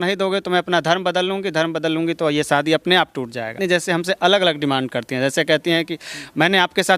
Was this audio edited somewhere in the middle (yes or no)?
yes